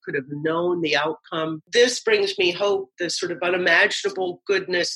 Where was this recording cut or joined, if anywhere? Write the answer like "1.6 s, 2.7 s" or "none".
1.6 s, 2.9 s